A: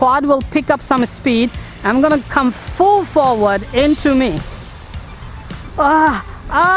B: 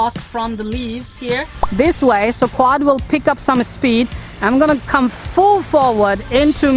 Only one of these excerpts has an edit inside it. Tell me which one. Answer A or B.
B